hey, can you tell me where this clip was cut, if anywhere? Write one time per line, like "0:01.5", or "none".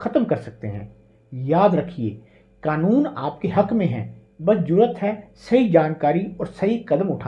none